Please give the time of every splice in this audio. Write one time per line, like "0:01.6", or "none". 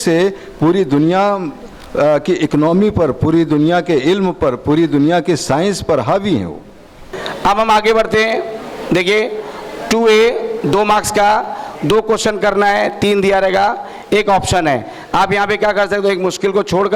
0:07.2

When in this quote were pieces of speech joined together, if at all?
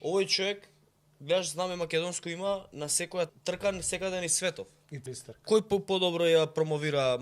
0:03.3
0:05.0

